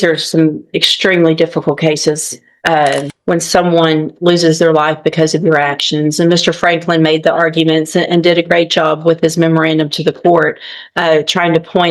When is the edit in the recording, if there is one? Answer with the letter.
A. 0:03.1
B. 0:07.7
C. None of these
A